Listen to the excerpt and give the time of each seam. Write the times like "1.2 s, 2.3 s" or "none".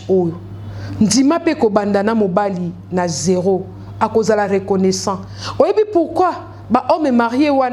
none